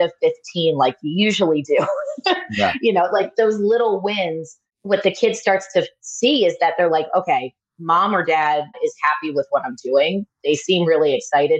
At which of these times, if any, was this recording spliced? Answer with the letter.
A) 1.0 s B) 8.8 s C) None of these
B